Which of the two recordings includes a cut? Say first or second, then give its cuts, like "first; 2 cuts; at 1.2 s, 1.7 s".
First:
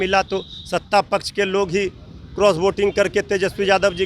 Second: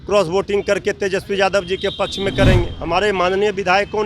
second; 1 cut; at 2.8 s